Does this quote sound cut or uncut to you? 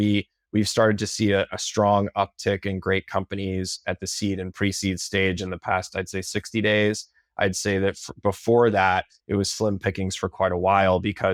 uncut